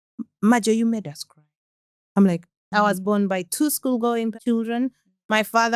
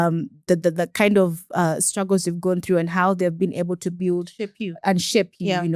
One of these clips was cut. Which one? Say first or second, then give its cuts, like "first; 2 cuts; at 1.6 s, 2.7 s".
first; 2 cuts; at 2.7 s, 4.3 s